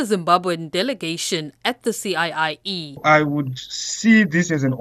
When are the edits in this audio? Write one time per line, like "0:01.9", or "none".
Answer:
0:03.0

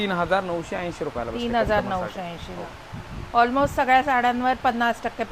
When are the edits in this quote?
none

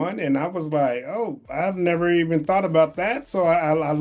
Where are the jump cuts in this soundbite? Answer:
0:01.4

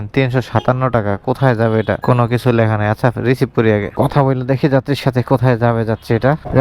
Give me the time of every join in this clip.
none

